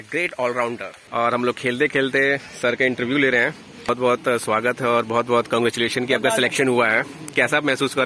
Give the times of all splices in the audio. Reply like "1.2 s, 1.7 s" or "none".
0.9 s, 3.9 s